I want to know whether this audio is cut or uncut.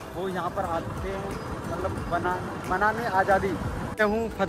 cut